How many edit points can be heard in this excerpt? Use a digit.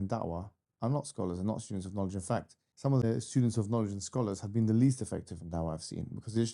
1